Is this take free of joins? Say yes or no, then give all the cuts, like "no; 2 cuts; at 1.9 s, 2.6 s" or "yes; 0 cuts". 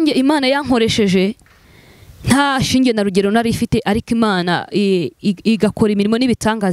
yes; 0 cuts